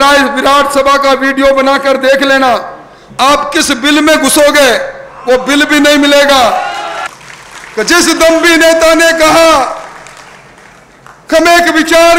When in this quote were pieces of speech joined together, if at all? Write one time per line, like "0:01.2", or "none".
0:06.9